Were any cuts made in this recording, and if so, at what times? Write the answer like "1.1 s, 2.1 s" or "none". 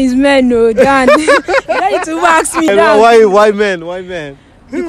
2.7 s